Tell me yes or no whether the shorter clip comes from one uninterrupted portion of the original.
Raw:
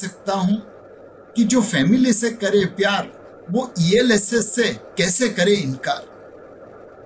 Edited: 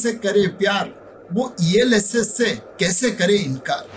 yes